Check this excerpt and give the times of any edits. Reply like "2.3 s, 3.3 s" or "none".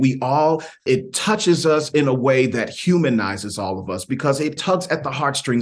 0.8 s, 4.6 s